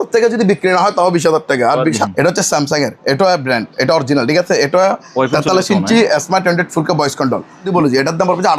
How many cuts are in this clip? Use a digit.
2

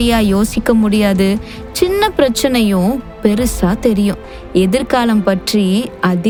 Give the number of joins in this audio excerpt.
0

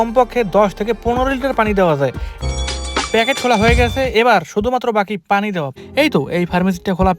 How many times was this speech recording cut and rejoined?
2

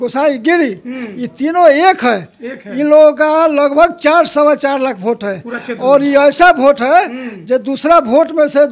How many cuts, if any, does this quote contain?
0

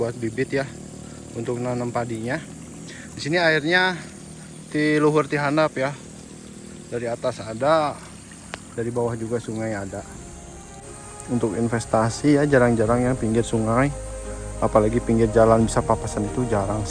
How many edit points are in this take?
1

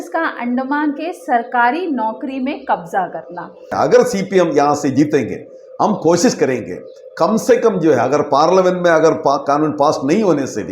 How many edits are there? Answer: 1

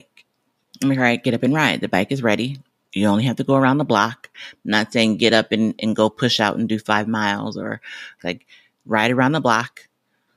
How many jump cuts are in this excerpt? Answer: 2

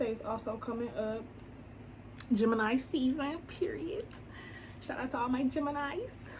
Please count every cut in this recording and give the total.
0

